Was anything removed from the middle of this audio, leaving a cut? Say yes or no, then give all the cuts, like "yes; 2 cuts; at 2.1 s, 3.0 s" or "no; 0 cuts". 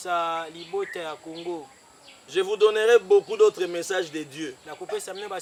no; 0 cuts